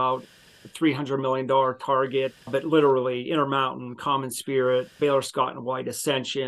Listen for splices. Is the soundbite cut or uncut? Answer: cut